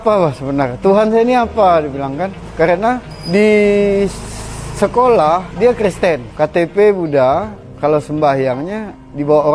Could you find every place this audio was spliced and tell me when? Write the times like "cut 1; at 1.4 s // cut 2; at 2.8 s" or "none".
cut 1; at 2.4 s // cut 2; at 3.1 s // cut 3; at 5.5 s // cut 4; at 6.3 s // cut 5; at 7.6 s